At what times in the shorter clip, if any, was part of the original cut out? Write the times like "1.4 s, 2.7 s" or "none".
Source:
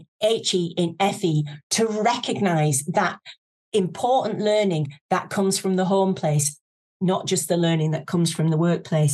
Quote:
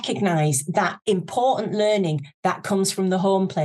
1.0 s